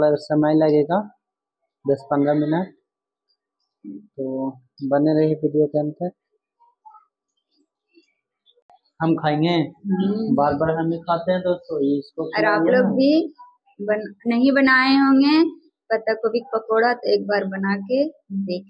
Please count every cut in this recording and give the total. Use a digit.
1